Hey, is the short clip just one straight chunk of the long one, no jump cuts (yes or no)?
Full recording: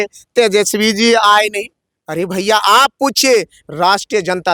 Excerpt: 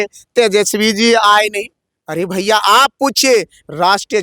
yes